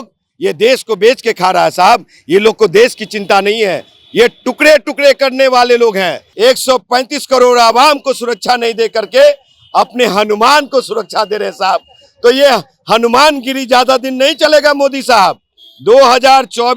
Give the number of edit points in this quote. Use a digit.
1